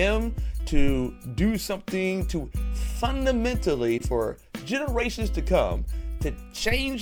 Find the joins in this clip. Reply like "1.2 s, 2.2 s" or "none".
none